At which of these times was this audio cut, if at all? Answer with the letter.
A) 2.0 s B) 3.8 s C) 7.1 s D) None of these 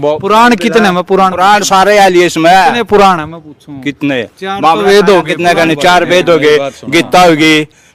D